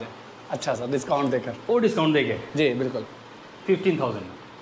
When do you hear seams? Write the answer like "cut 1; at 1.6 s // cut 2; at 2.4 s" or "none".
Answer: none